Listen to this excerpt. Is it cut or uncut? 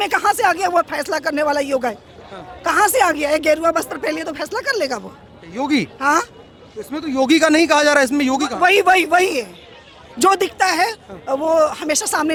uncut